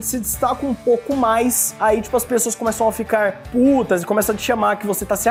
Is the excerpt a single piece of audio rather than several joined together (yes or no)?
yes